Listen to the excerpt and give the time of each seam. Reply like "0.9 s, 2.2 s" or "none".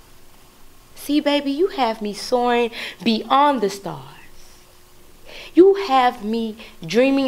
none